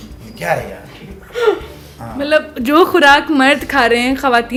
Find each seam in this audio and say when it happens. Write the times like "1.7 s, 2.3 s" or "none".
none